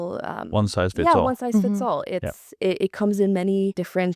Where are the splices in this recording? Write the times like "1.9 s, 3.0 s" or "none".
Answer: none